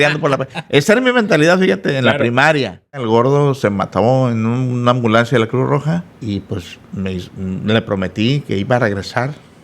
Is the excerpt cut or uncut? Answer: cut